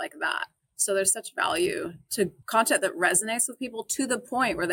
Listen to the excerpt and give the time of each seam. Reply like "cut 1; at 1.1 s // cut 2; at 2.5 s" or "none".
cut 1; at 2.4 s